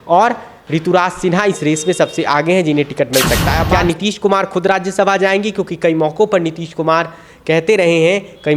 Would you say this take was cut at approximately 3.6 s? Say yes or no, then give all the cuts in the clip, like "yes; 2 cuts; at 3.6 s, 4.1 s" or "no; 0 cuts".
yes; 1 cut; at 3.6 s